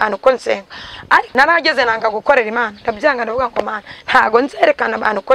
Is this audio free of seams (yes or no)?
no